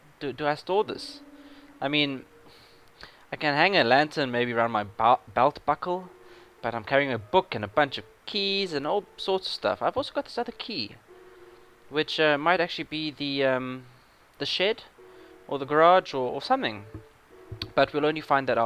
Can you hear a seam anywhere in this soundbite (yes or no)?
no